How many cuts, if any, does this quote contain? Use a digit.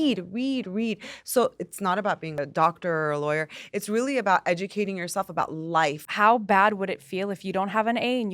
2